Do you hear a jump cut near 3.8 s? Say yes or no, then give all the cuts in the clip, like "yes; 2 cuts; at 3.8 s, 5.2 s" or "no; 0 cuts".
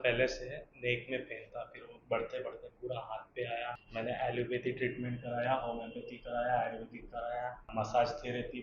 yes; 2 cuts; at 3.8 s, 7.7 s